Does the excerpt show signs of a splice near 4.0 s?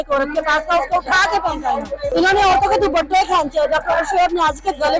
no; 1 cut; at 2.1 s

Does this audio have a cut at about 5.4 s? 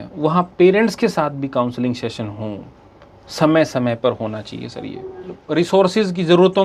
yes; 1 cut; at 5.4 s

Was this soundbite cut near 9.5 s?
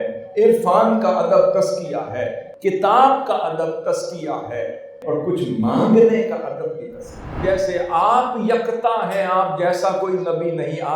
no; 3 cuts; at 2.4 s, 5.0 s, 7.3 s

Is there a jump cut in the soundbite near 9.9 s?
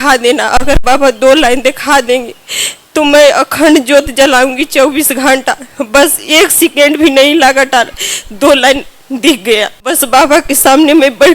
yes; 1 cut; at 9.9 s

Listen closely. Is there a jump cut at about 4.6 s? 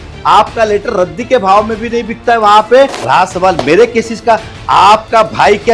no; 1 cut; at 3.0 s

